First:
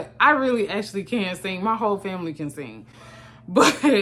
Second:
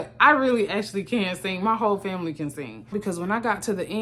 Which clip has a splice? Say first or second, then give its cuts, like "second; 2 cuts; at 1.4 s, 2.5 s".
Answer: second; 1 cut; at 3.0 s